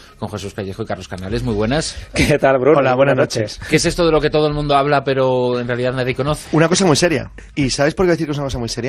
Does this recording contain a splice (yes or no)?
yes